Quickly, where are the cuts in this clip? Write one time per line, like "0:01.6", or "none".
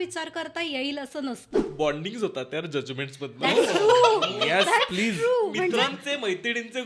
0:01.5